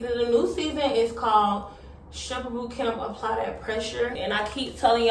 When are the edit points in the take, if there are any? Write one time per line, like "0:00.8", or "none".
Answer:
0:04.2